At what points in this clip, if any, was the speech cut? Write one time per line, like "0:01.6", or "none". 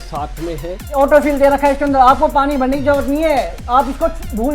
0:01.0